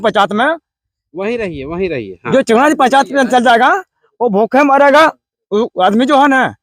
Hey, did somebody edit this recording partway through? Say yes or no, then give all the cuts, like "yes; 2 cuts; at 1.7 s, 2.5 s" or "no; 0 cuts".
no; 0 cuts